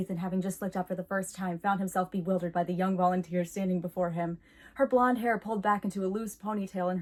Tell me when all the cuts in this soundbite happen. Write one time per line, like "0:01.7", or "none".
none